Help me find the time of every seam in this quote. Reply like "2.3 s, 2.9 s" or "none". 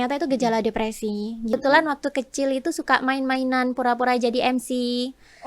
1.5 s

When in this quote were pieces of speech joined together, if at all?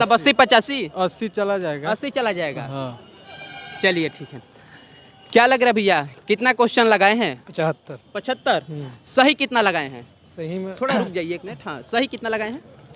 none

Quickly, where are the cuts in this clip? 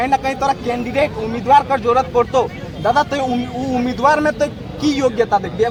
none

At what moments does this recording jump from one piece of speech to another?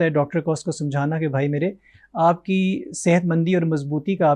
none

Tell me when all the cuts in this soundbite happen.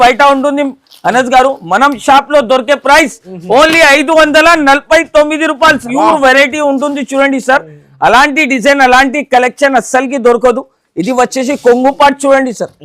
5.8 s

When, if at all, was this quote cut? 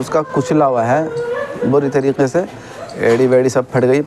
none

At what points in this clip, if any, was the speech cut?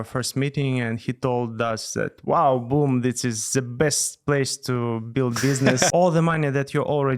5.9 s

